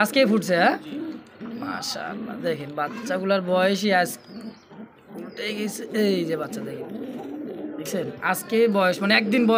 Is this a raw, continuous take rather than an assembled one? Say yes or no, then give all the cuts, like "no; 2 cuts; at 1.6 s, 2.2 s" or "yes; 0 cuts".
yes; 0 cuts